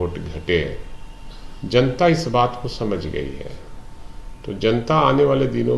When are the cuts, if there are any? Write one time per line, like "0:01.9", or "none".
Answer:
none